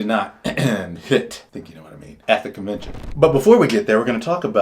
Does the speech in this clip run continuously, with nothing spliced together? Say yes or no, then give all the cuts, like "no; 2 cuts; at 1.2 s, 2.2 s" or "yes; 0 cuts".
no; 1 cut; at 2.9 s